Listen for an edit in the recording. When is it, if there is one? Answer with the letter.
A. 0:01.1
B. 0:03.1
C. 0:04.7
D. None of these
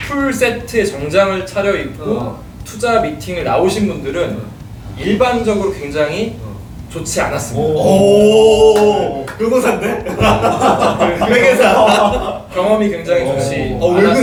D